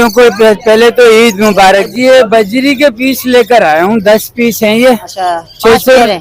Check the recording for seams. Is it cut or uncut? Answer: cut